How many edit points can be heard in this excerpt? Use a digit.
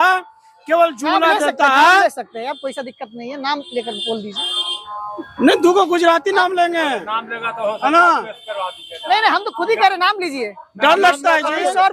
0